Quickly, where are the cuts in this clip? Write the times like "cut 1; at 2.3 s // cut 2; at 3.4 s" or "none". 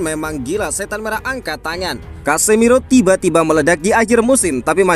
cut 1; at 2.1 s